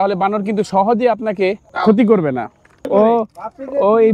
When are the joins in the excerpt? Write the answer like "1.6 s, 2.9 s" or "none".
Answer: 1.7 s, 2.9 s